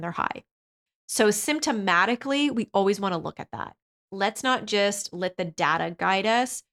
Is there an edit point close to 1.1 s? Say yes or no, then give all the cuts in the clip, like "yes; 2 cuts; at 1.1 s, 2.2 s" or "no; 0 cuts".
no; 1 cut; at 3.9 s